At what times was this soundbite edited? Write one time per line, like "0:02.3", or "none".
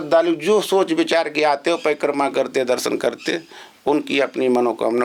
none